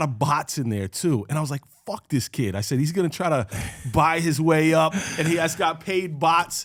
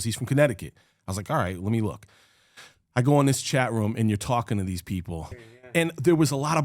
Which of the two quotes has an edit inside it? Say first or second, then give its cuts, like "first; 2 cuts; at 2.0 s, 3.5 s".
second; 1 cut; at 5.6 s